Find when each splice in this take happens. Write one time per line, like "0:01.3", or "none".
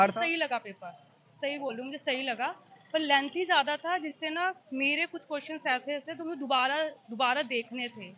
none